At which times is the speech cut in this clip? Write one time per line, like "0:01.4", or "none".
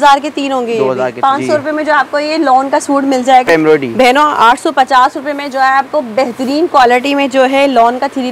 0:01.1
0:03.5